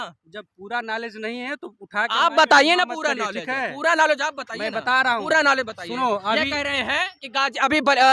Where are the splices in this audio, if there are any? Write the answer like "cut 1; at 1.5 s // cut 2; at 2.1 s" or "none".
none